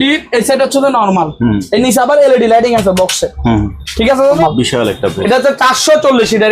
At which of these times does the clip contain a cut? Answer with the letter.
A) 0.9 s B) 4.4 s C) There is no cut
B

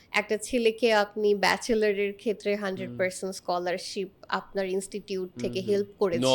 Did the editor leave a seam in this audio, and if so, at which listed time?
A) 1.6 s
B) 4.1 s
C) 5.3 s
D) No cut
D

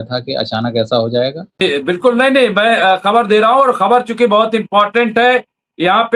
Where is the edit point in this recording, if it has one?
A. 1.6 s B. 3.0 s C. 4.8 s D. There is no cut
A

